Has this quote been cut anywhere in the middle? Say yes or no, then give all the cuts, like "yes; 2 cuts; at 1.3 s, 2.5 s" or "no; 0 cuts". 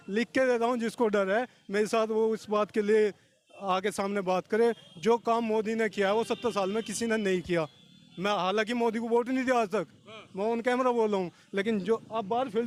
no; 0 cuts